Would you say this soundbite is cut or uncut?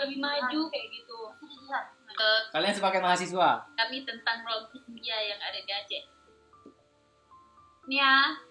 cut